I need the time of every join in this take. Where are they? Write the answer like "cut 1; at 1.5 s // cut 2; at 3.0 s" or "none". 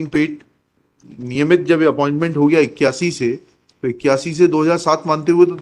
cut 1; at 1.0 s